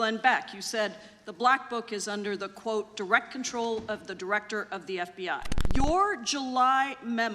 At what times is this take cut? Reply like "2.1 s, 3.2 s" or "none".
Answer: 5.5 s